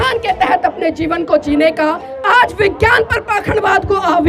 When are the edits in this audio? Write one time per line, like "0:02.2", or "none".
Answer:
0:02.1